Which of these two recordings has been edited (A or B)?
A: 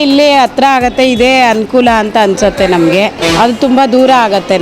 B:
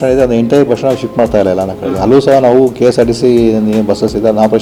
A